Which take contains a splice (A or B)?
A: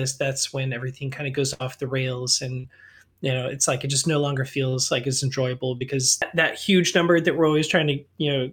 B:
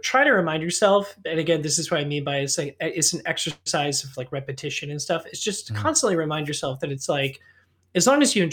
A